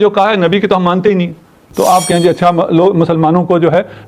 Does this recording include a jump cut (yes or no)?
yes